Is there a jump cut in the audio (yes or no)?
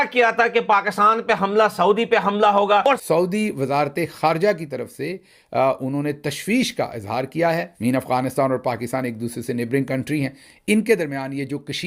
yes